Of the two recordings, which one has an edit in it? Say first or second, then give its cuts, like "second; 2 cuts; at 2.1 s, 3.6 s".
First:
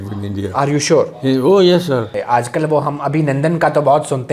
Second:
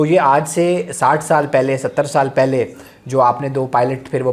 first; 1 cut; at 2.2 s